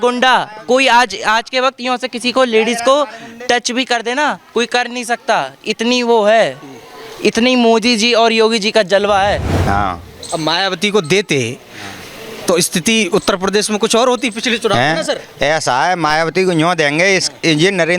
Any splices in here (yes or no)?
yes